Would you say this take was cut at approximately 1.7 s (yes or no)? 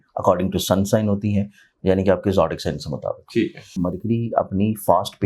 no